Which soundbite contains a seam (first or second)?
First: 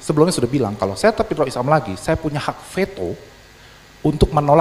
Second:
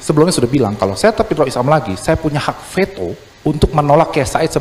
second